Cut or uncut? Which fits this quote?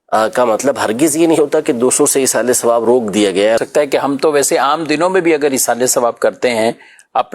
cut